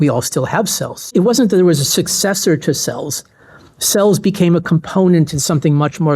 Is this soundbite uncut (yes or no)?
no